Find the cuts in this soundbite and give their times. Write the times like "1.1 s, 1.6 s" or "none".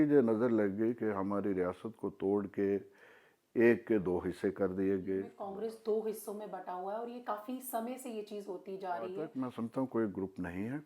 5.4 s, 9.4 s